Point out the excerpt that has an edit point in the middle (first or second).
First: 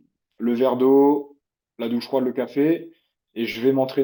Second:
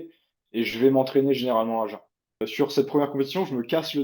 second